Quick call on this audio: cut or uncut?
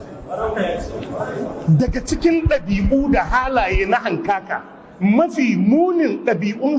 uncut